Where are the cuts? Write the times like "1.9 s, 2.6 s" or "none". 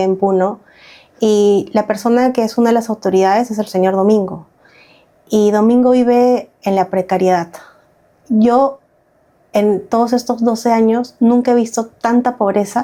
none